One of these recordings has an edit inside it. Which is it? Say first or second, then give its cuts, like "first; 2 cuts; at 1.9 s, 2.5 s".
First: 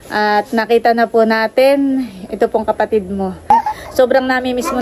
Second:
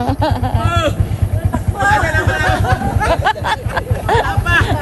first; 1 cut; at 3.5 s